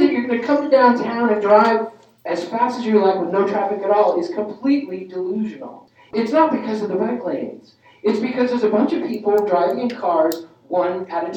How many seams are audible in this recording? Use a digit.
1